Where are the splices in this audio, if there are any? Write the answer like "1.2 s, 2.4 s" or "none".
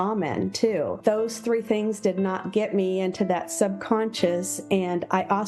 1.0 s

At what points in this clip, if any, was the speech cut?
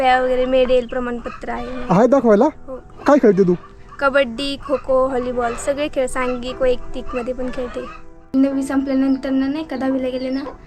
8.3 s

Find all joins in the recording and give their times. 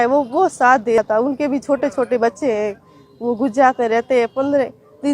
1.0 s

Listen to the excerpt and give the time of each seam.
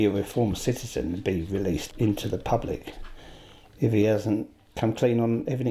1.9 s, 4.6 s

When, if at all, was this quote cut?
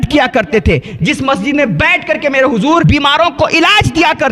2.8 s

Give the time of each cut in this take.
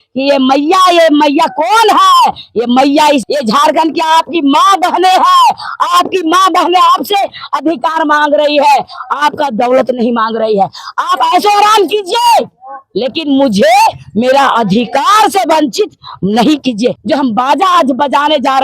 3.2 s, 17.0 s

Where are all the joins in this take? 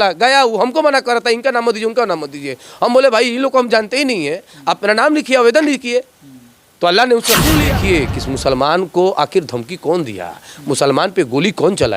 7.7 s

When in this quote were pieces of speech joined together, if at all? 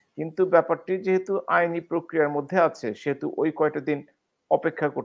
none

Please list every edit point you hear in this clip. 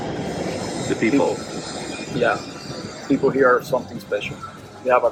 none

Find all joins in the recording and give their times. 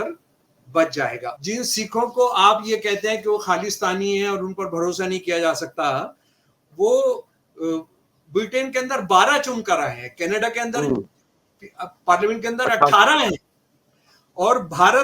1.3 s

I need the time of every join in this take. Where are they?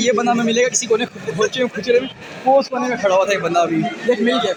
none

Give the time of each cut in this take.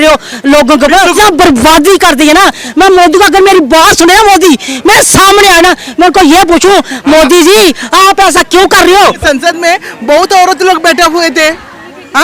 1.1 s, 9.2 s

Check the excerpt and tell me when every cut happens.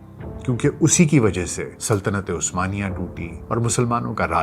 1.7 s, 3.3 s

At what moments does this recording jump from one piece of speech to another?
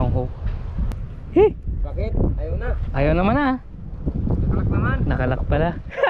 0.9 s

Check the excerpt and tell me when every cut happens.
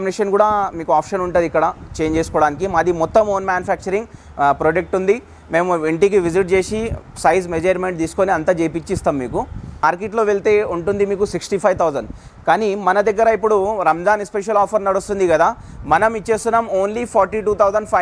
none

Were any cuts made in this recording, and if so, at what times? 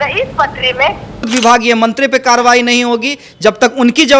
1.3 s

